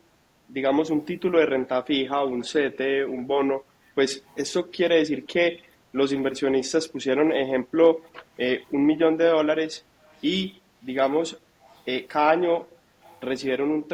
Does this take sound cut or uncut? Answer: uncut